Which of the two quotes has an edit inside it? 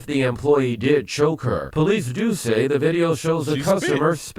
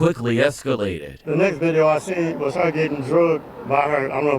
second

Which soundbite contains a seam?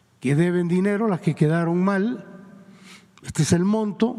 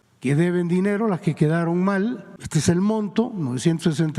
second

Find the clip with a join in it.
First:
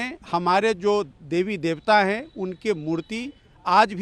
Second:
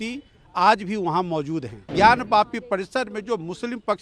second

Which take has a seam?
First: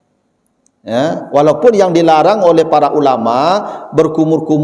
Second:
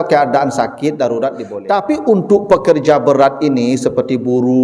second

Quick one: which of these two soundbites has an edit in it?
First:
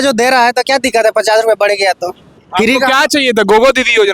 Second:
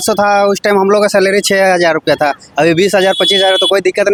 first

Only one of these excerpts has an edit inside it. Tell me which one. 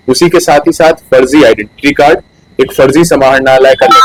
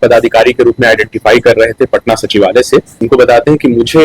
second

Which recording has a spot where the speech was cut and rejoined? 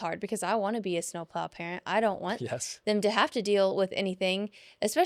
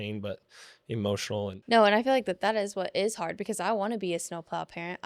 second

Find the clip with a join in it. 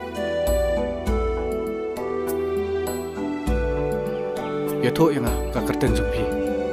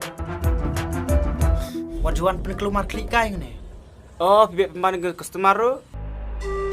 second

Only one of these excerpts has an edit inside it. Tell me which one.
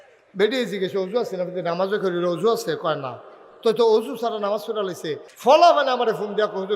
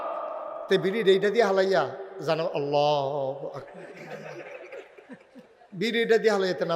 first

